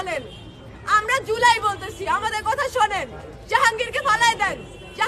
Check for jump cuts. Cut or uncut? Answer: uncut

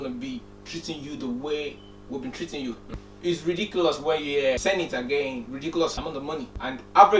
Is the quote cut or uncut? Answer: cut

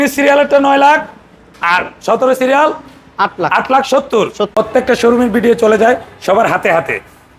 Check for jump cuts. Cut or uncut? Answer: cut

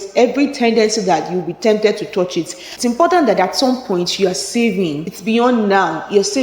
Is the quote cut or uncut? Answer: cut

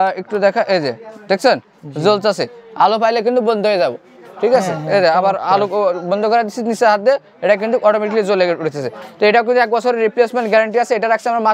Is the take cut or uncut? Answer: uncut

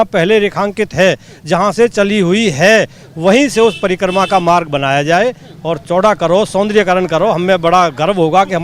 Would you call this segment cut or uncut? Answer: uncut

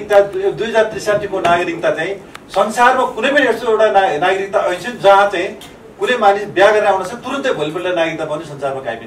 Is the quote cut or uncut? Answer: uncut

